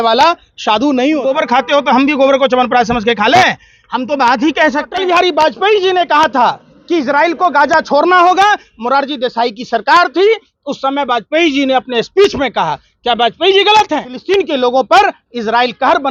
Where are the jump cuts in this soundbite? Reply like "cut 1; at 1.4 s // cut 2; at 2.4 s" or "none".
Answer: cut 1; at 1.2 s // cut 2; at 5.0 s // cut 3; at 14.1 s